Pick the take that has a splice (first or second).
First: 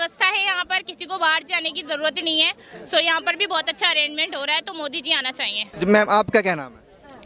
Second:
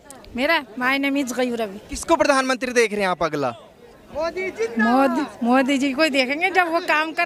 first